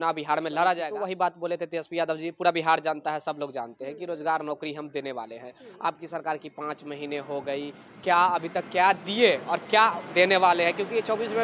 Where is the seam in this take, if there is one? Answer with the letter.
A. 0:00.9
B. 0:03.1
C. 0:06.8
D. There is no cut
A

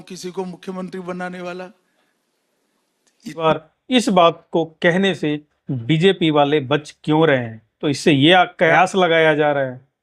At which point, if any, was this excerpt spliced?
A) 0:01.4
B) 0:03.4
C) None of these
B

